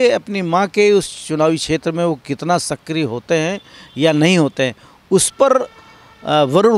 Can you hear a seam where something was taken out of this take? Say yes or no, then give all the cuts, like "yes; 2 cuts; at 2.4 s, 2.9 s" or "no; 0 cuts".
no; 0 cuts